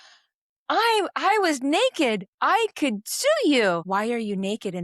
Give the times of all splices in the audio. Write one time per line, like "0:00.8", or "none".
0:03.8